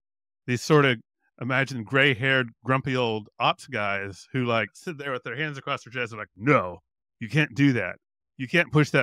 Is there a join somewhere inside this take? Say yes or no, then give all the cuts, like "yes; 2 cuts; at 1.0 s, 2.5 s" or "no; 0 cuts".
yes; 1 cut; at 4.8 s